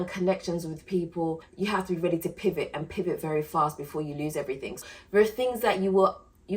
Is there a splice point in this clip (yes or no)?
yes